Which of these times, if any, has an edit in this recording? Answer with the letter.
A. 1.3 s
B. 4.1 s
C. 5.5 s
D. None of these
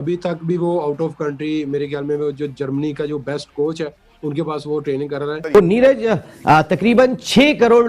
C